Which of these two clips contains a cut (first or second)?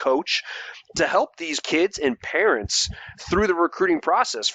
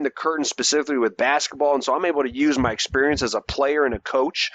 first